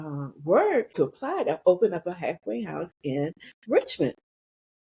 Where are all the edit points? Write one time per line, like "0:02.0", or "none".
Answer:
0:00.9